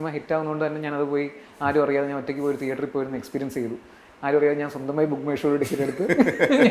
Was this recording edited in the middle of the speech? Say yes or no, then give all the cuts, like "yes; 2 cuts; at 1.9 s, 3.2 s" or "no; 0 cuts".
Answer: no; 0 cuts